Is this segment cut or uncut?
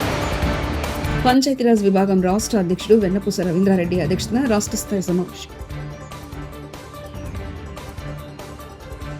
cut